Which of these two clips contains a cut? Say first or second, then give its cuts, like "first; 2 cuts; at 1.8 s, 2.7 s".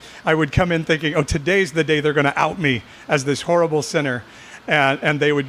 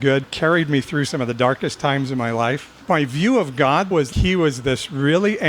second; 2 cuts; at 2.7 s, 3.9 s